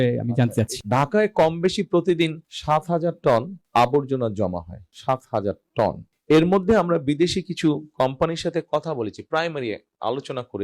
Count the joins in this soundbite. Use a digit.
1